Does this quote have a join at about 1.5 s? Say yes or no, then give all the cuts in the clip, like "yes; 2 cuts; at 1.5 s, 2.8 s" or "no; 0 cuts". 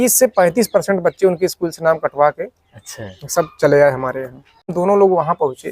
no; 1 cut; at 4.7 s